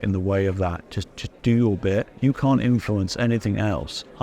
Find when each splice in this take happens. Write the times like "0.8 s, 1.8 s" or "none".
2.1 s